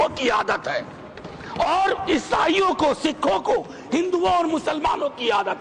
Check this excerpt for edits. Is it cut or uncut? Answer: uncut